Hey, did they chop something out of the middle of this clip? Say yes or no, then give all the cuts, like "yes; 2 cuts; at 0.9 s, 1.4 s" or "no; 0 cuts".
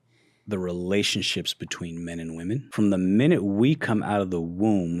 yes; 1 cut; at 2.7 s